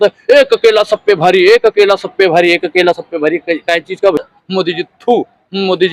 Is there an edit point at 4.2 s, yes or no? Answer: yes